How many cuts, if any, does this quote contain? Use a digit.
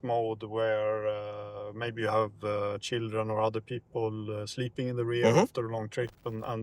0